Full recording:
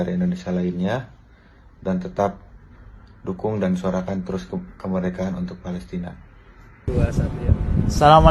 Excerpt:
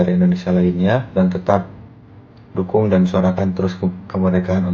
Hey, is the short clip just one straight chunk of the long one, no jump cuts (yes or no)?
no